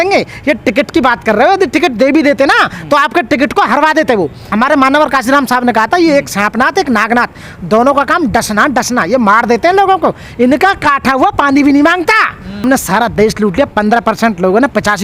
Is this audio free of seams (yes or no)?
no